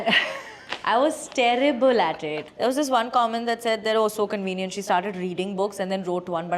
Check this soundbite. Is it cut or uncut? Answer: cut